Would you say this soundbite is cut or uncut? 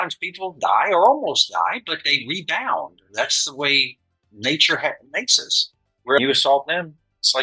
cut